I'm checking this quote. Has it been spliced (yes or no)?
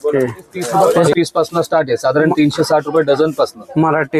yes